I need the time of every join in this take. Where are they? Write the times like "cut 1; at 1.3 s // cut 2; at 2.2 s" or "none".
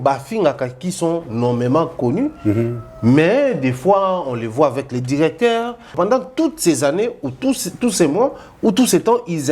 cut 1; at 5.9 s